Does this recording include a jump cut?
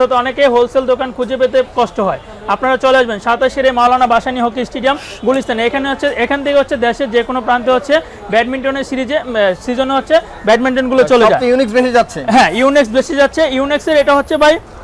no; 0 cuts

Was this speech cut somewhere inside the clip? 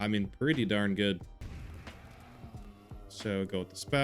yes; 1 cut; at 1.4 s

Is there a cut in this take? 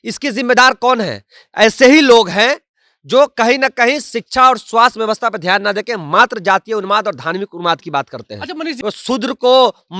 yes; 1 cut; at 8.7 s

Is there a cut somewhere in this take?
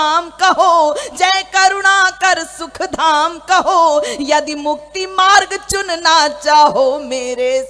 no; 0 cuts

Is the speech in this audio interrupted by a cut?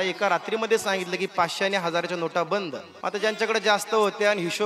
yes; 1 cut; at 2.9 s

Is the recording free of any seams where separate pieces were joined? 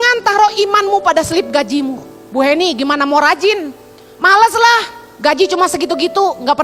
yes; 0 cuts

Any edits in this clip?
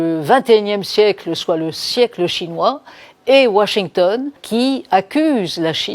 yes; 1 cut; at 4.4 s

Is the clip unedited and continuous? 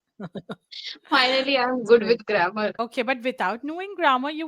no; 1 cut; at 2.7 s

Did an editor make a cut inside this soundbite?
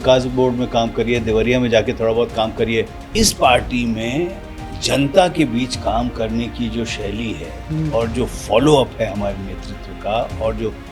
yes; 1 cut; at 3.0 s

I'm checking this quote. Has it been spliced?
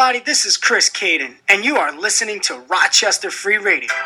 no; 0 cuts

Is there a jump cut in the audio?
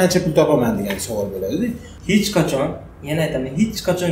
yes; 1 cut; at 1.9 s

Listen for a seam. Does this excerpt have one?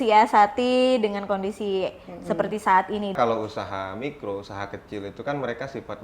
yes; 1 cut; at 3.1 s

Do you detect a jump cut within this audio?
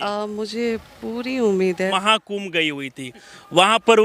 yes; 1 cut; at 1.9 s

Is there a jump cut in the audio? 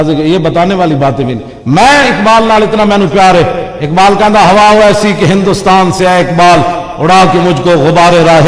no; 0 cuts

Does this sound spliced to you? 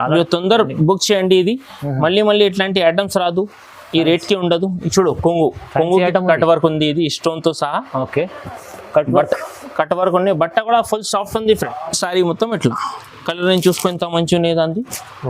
yes; 1 cut; at 11.7 s

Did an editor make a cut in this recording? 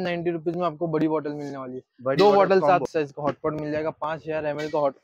yes; 1 cut; at 2.9 s

